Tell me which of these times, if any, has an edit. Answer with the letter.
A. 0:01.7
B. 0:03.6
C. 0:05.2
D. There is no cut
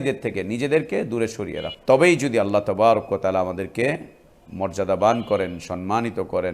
A